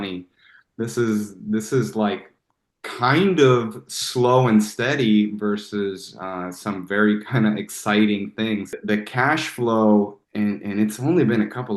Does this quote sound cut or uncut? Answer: cut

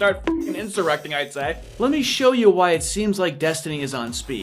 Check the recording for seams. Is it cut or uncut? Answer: cut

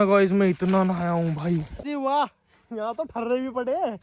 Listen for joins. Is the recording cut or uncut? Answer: cut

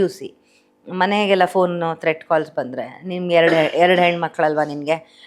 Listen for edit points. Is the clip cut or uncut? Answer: uncut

